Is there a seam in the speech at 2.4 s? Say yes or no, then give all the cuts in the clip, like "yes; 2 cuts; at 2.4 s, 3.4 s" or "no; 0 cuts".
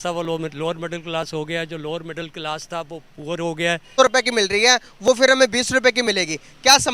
no; 1 cut; at 3.9 s